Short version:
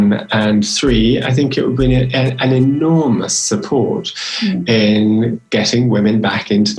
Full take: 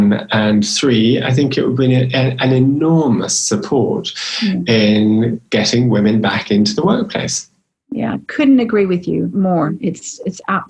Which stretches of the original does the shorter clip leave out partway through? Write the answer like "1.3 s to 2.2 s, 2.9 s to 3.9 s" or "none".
none